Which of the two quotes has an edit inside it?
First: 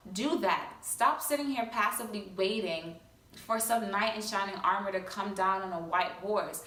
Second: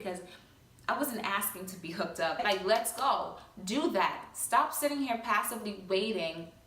second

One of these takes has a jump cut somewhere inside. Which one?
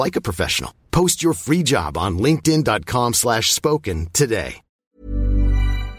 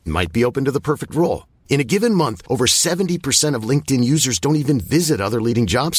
first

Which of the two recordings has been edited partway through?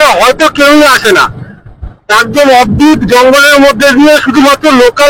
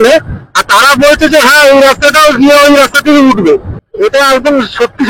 second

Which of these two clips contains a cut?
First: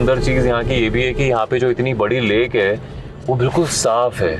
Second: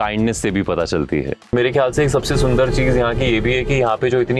second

